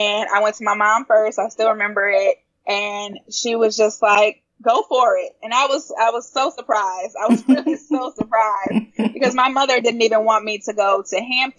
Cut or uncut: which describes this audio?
cut